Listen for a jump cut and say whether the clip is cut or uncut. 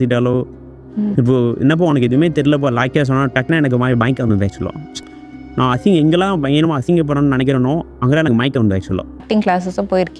cut